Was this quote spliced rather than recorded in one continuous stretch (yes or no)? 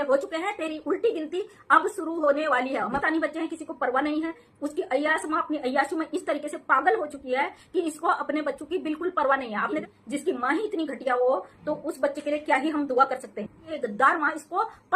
yes